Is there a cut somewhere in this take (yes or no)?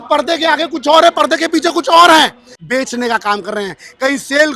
yes